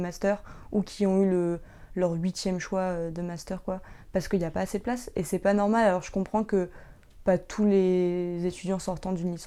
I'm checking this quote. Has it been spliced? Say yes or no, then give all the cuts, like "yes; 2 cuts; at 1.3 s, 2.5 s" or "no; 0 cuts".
no; 0 cuts